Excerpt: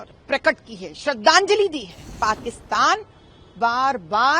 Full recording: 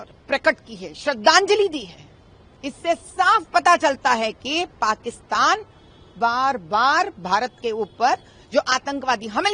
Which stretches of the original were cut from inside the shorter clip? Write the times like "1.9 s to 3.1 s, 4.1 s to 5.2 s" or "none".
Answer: 2.1 s to 4.7 s